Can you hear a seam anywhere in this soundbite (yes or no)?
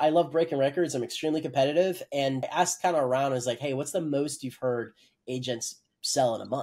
yes